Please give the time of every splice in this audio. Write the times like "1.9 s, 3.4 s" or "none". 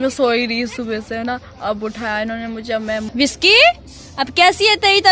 3.1 s